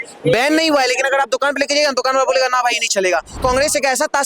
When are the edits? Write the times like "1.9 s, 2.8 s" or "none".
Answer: 3.4 s

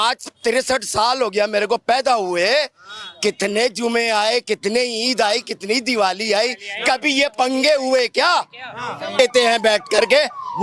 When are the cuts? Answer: 9.2 s

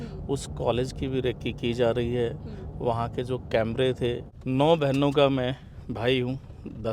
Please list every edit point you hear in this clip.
4.3 s

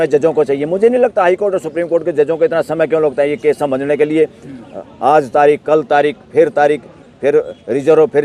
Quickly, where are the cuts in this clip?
none

